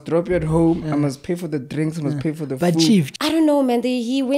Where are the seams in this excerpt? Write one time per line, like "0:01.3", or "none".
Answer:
0:03.1